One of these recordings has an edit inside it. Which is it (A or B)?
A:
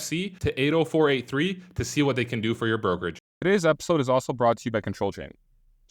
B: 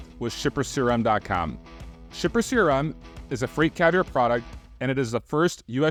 A